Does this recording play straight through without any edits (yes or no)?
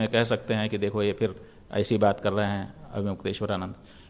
yes